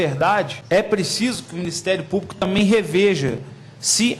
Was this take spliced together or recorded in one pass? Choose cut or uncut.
uncut